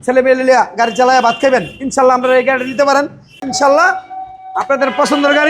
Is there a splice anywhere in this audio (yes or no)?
yes